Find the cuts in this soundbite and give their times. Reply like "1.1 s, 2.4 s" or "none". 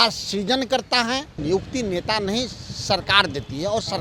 1.3 s

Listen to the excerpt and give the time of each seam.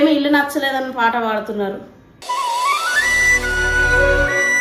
none

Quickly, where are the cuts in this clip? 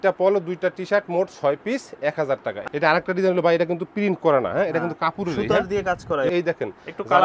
2.6 s, 6.3 s

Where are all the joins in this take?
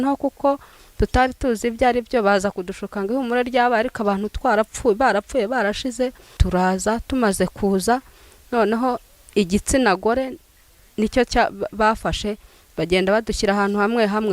6.4 s

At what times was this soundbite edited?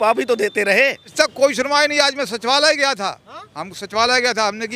1.1 s

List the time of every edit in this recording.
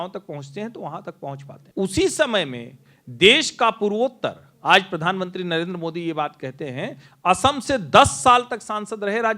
1.5 s

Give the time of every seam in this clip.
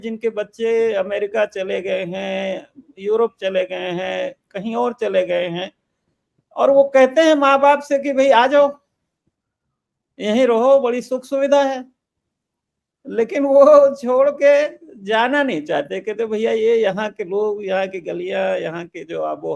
none

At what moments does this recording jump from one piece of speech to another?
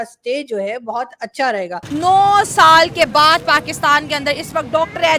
1.8 s

